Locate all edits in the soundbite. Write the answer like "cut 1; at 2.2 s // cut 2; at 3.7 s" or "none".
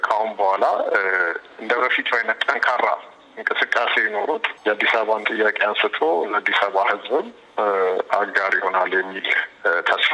none

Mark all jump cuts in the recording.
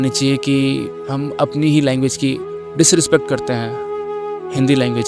none

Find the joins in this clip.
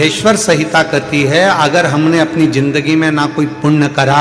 none

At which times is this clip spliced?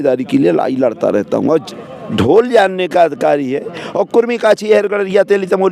cut 1; at 1.7 s

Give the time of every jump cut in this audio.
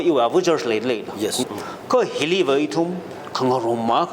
cut 1; at 1.4 s

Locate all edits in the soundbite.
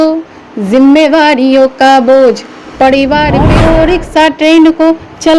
cut 1; at 3.5 s

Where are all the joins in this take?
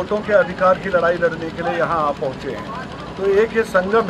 none

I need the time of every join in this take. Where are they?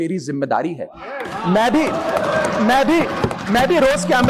none

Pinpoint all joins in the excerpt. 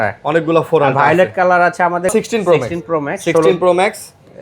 cut 1; at 2.1 s

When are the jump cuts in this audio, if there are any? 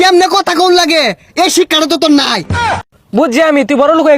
cut 1; at 2.8 s

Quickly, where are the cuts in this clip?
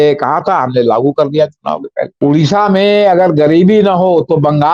cut 1; at 2.1 s

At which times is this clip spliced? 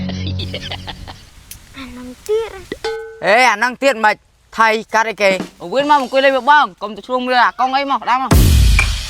cut 1; at 5.5 s

